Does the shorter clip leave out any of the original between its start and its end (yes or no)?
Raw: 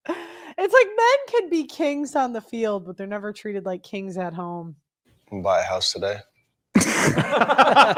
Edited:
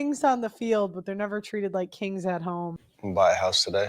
yes